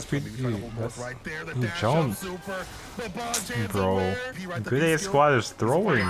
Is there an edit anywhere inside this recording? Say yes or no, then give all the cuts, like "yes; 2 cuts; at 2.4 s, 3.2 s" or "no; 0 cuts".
yes; 1 cut; at 4.4 s